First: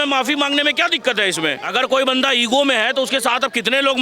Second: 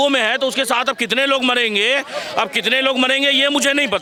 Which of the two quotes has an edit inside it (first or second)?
first